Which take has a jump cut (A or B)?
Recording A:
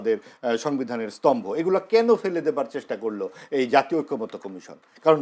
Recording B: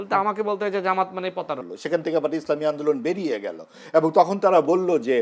B